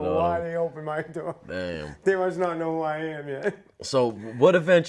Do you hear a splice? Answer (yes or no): no